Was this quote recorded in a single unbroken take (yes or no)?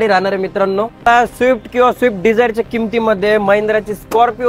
no